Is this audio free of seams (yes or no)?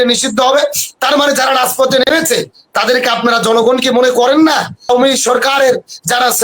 no